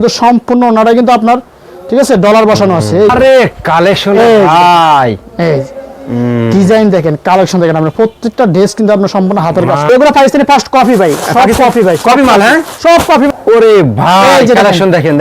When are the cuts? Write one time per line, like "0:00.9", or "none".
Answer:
0:03.1
0:09.9
0:13.3